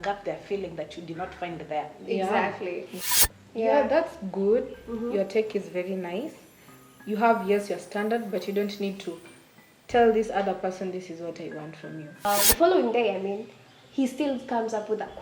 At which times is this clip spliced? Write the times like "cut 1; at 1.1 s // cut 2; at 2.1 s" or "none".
cut 1; at 2.9 s // cut 2; at 12.2 s